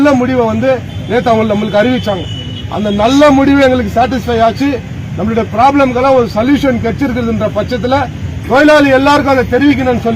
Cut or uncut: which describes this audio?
uncut